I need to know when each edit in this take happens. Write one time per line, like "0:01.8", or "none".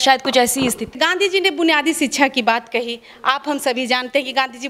0:01.0